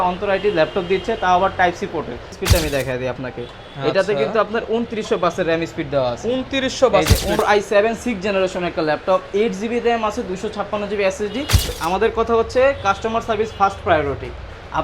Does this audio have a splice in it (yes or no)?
yes